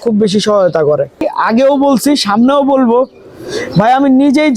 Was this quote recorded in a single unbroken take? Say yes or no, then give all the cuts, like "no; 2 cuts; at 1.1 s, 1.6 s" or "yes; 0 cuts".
no; 1 cut; at 1.3 s